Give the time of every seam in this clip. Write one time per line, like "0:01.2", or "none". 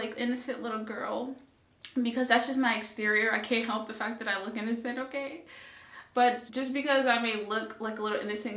0:06.5